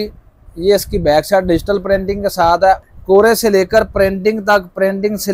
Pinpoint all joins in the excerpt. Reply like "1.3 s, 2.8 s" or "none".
2.9 s